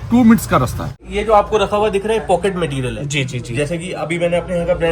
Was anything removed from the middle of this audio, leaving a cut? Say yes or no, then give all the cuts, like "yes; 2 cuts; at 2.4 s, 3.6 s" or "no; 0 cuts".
yes; 1 cut; at 1.0 s